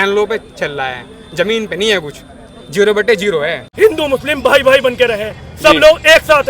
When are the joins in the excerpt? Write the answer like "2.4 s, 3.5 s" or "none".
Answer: 3.6 s